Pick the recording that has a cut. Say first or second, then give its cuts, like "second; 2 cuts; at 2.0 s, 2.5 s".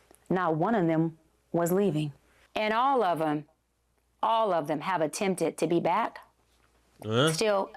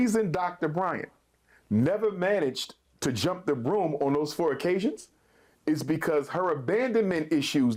first; 1 cut; at 2.4 s